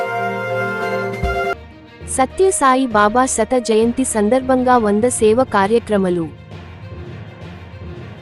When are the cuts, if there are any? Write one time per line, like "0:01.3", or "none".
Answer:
0:01.6

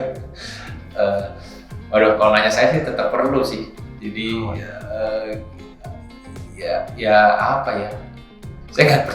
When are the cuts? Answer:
none

